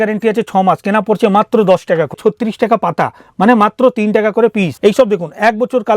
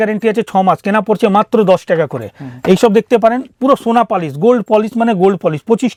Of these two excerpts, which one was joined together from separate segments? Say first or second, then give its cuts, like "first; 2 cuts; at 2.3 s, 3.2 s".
first; 2 cuts; at 2.1 s, 4.7 s